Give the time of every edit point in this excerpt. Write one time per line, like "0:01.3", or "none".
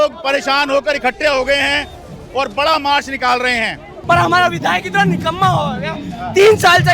0:03.9